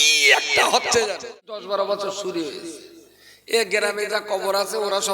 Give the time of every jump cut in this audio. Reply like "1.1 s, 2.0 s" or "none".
1.6 s